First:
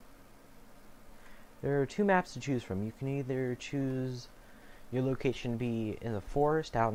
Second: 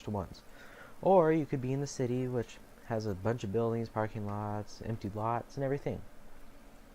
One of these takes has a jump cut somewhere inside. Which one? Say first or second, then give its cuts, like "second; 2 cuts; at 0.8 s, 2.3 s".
second; 1 cut; at 5.7 s